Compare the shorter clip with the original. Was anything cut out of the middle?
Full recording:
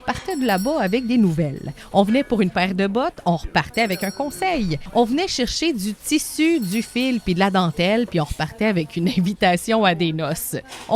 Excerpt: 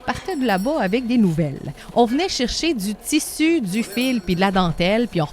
yes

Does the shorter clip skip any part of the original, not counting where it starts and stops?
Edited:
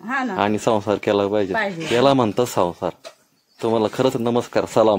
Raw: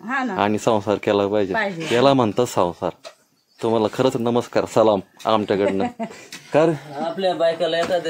no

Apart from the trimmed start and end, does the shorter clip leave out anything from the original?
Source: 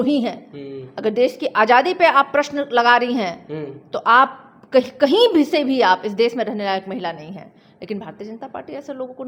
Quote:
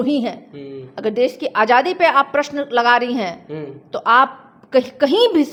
no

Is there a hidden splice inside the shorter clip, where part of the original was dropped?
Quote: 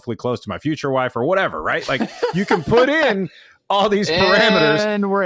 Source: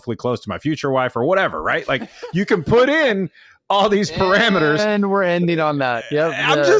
no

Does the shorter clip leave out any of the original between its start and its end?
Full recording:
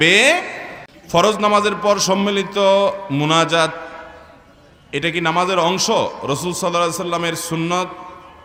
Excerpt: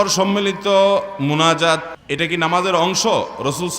yes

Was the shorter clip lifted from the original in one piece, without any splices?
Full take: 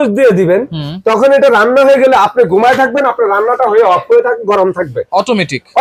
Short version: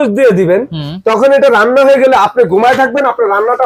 yes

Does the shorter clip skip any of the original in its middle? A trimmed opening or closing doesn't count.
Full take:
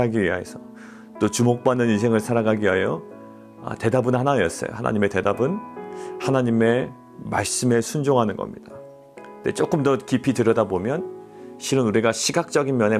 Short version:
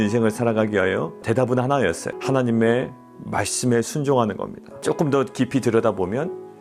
yes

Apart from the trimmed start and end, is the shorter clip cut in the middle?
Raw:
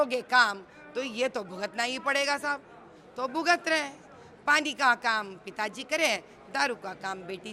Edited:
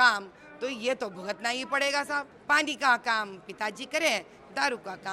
yes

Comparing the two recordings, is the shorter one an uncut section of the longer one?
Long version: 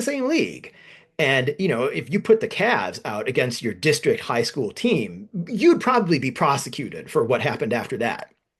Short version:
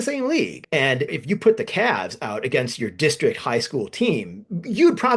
no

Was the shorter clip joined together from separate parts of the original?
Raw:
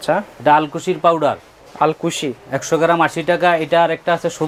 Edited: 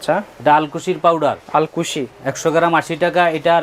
yes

